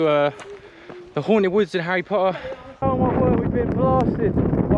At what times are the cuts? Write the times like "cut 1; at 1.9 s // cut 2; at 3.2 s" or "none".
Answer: cut 1; at 2.8 s